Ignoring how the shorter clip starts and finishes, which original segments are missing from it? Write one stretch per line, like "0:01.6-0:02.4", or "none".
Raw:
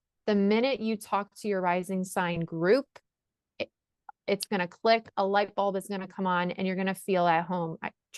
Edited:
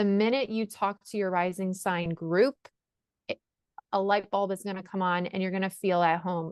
0:04.1-0:05.1